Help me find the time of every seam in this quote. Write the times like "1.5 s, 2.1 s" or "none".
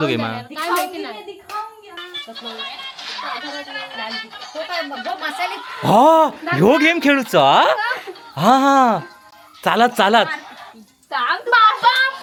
none